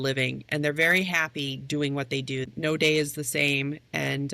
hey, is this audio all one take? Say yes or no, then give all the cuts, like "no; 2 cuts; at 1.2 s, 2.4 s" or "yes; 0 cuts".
no; 1 cut; at 2.5 s